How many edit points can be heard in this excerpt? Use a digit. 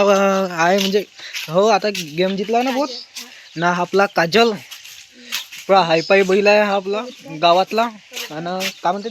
1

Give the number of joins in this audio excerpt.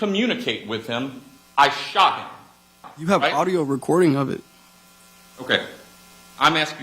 1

